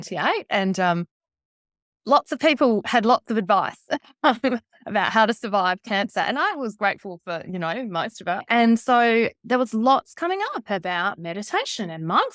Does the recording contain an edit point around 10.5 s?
no; 1 cut; at 8.4 s

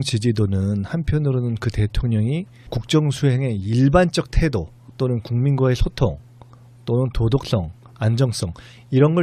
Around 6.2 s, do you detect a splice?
no; 0 cuts

